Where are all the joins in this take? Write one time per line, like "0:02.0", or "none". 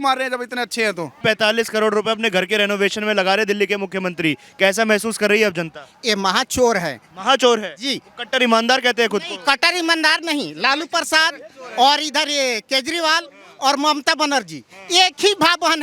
none